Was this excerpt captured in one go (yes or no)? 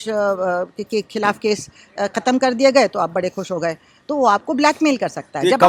yes